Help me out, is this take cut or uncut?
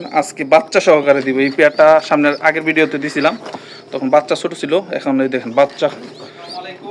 uncut